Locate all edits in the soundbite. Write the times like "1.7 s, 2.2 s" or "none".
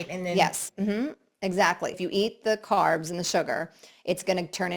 2.0 s